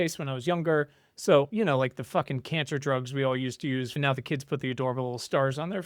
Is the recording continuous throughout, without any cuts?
no; 2 cuts; at 1.5 s, 3.9 s

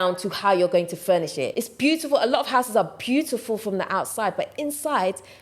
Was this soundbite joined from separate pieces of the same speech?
yes; 1 cut; at 1.6 s

